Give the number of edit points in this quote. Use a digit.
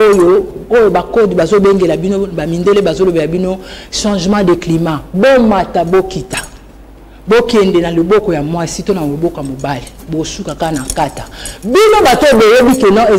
0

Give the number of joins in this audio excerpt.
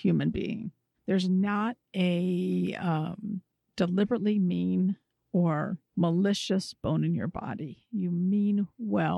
2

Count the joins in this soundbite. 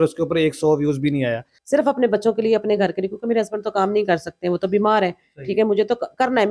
1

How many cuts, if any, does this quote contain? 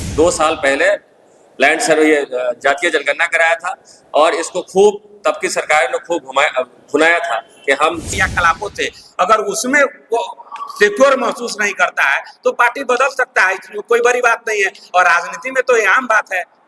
1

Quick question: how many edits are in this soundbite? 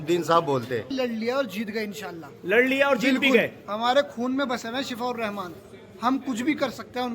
1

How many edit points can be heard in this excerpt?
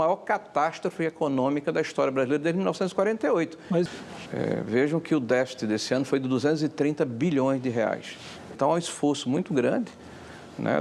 1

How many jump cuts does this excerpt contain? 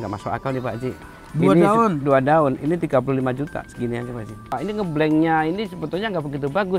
1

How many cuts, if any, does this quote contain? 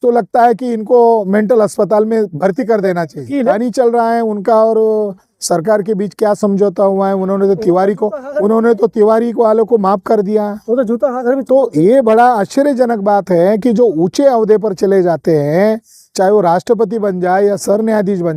1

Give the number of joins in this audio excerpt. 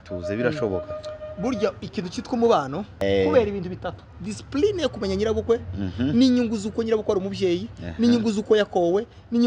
1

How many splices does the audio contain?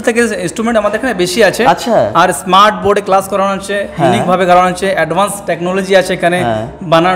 0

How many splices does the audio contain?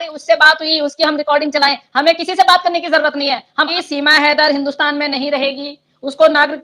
1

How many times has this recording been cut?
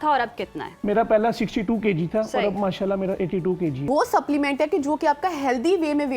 1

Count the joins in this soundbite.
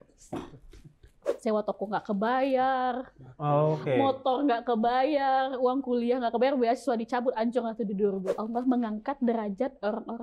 2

